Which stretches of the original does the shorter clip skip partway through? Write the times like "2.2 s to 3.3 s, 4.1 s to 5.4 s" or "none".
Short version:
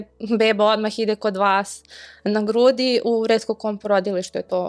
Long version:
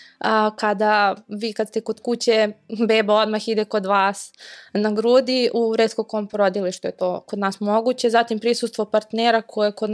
none